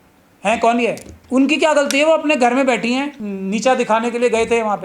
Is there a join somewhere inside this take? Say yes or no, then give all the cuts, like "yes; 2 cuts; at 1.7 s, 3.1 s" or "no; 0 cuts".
yes; 2 cuts; at 1.1 s, 3.2 s